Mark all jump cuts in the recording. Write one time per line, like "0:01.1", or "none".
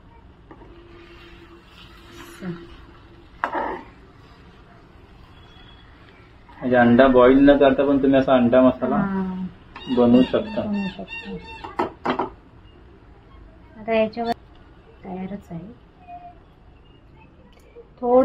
0:14.3